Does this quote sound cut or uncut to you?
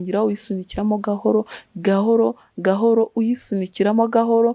uncut